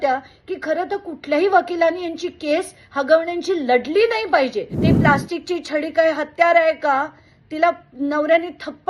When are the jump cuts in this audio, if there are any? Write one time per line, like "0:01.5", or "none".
0:04.8